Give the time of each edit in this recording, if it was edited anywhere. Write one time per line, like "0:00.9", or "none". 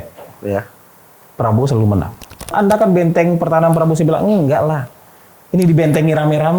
0:02.5